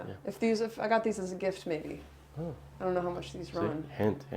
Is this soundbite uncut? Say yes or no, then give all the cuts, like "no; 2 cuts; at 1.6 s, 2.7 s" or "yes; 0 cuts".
yes; 0 cuts